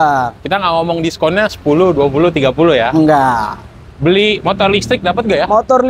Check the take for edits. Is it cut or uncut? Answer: uncut